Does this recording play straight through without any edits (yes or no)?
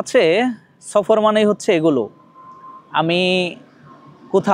yes